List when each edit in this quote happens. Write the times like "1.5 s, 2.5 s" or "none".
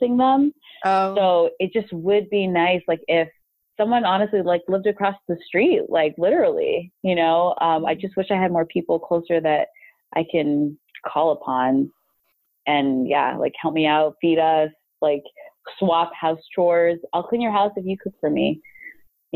none